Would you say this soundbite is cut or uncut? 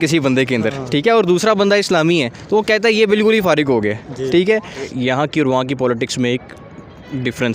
cut